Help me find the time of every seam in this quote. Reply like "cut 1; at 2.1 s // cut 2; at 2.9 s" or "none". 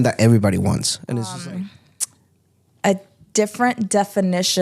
cut 1; at 1.4 s